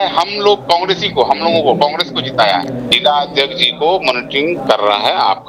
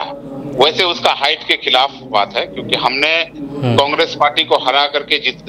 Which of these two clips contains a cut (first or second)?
first